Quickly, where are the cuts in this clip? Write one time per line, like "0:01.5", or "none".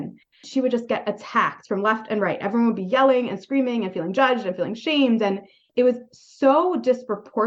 0:05.6